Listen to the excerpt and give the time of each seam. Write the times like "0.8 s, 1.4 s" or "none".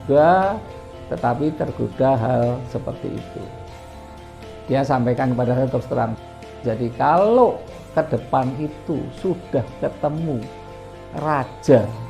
6.1 s